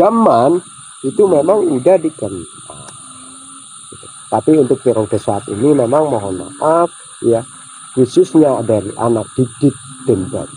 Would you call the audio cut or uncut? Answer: uncut